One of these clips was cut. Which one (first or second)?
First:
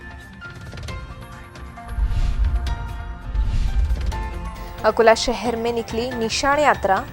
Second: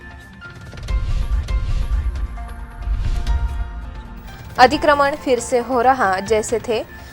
first